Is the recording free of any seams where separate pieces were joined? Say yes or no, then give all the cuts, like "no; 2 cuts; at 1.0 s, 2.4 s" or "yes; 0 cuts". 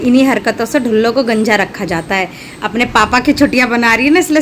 yes; 0 cuts